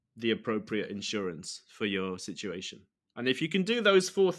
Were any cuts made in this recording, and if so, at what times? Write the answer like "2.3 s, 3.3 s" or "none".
none